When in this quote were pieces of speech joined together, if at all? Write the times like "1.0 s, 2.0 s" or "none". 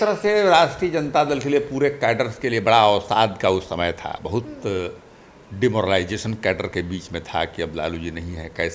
none